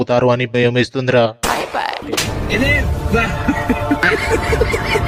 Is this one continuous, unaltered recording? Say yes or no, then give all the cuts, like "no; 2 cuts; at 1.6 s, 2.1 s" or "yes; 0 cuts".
yes; 0 cuts